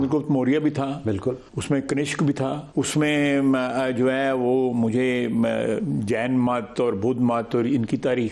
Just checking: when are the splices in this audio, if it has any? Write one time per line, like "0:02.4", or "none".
0:01.5
0:02.6